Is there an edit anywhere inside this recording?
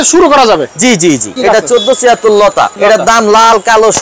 yes; 2 cuts; at 1.3 s, 2.7 s

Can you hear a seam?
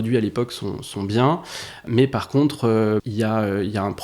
yes; 2 cuts; at 1.9 s, 3.0 s

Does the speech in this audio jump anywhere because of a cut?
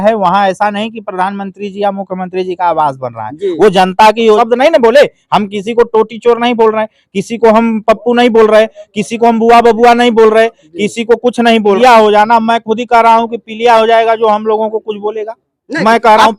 yes; 2 cuts; at 4.4 s, 11.8 s

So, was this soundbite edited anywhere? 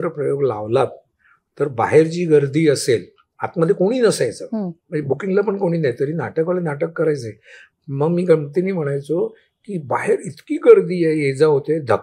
no; 0 cuts

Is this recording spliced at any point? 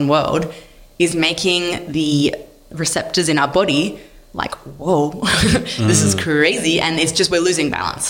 no; 0 cuts

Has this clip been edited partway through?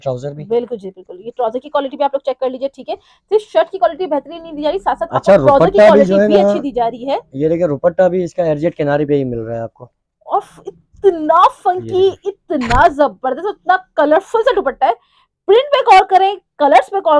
no; 0 cuts

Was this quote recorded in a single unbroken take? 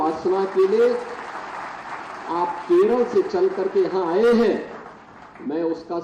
yes; 0 cuts

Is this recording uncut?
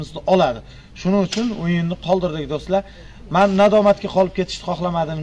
yes; 0 cuts

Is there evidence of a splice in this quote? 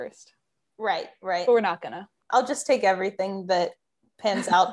yes; 1 cut; at 2.2 s

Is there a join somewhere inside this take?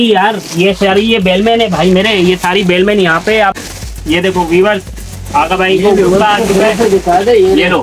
yes; 1 cut; at 3.5 s

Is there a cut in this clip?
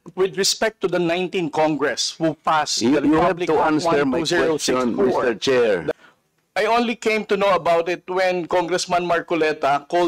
yes; 1 cut; at 5.9 s

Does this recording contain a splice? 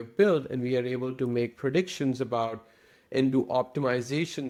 no; 0 cuts

